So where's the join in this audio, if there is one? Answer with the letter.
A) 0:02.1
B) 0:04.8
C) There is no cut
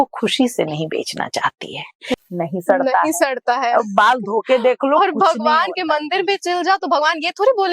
A